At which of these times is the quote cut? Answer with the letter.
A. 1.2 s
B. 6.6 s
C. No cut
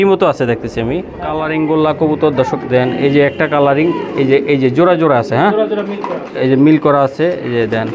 A